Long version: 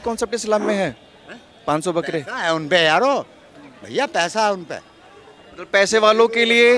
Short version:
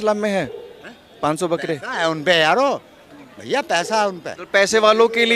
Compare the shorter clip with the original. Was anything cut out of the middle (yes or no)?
yes